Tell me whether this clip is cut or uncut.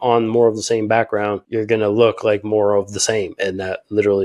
uncut